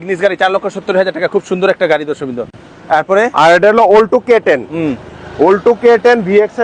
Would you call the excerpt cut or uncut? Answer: uncut